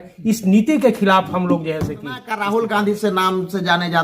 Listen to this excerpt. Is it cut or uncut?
cut